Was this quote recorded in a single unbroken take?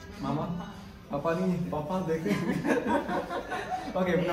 yes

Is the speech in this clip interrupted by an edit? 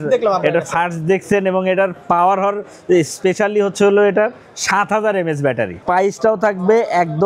yes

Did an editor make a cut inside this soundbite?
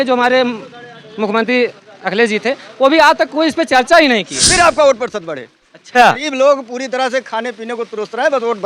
yes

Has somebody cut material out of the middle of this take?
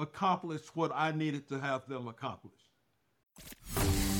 yes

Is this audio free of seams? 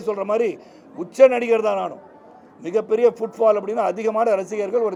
yes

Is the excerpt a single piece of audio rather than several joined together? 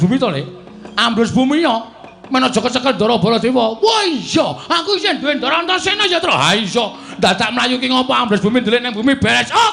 yes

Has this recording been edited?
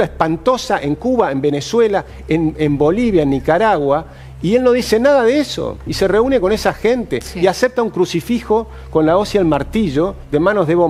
no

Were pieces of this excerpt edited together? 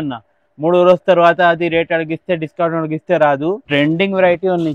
yes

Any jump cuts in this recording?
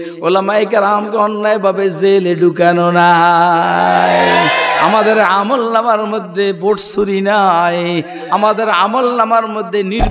no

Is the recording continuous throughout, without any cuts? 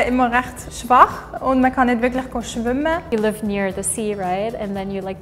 no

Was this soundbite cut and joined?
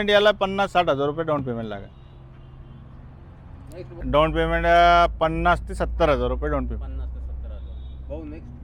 yes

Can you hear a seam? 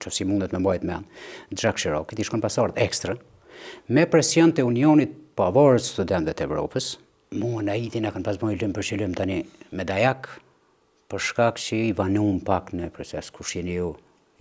yes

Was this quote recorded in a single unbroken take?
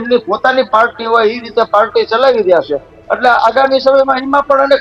yes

